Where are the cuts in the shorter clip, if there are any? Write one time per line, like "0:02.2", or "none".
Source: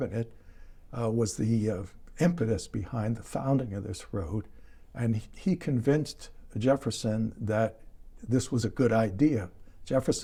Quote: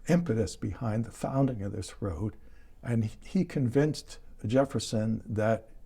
none